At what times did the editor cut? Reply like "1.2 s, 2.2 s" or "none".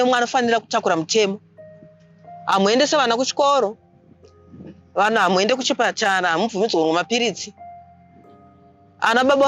none